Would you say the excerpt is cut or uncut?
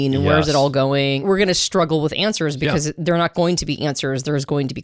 cut